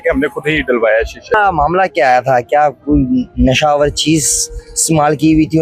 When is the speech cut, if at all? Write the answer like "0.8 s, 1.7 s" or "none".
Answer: 1.3 s